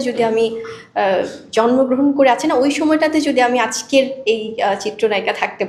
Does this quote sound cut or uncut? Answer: uncut